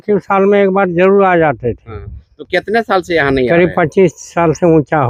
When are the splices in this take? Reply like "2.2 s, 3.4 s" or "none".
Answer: none